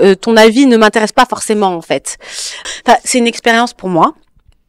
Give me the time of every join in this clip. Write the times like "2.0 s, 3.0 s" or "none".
2.7 s